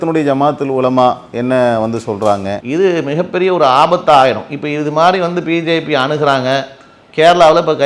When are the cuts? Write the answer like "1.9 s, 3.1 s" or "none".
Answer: 2.6 s

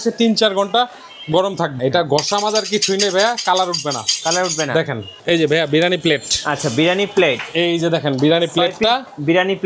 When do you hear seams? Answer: 1.7 s, 5.2 s

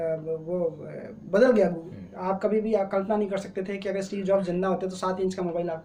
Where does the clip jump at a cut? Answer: none

